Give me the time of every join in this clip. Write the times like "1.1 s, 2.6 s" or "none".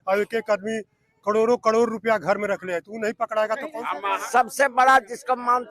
4.2 s